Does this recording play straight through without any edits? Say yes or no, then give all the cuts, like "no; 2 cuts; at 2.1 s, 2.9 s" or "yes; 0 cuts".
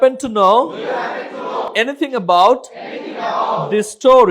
no; 1 cut; at 1.7 s